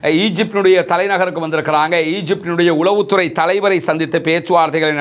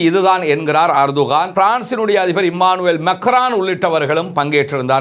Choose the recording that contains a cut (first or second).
second